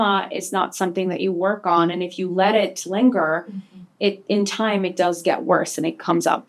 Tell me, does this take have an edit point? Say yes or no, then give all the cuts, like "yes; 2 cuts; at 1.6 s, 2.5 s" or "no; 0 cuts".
no; 0 cuts